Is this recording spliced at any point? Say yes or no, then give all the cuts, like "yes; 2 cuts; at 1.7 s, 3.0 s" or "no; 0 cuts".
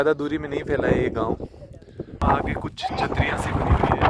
no; 0 cuts